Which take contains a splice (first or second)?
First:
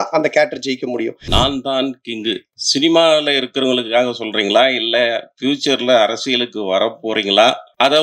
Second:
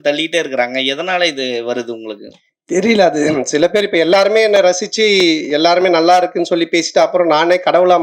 first